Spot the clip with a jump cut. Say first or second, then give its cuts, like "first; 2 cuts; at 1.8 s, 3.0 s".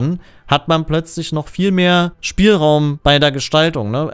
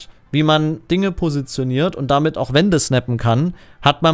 first; 2 cuts; at 2.2 s, 2.9 s